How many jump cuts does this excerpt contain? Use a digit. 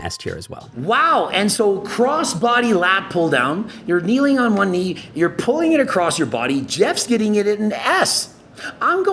0